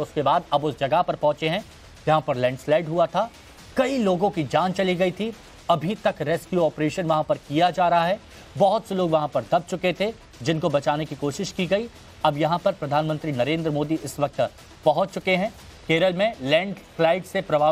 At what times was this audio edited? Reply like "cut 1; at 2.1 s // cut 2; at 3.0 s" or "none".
cut 1; at 3.1 s